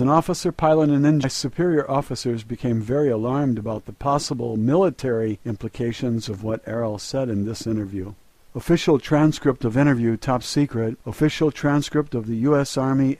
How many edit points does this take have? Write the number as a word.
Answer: zero